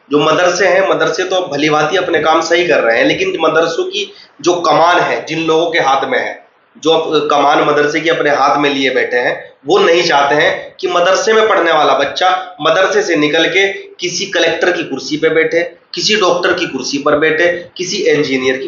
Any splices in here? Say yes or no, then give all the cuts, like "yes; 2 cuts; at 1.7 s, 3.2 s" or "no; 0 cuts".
no; 0 cuts